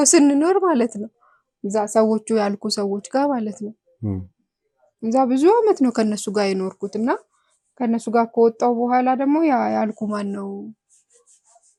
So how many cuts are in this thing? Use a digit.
0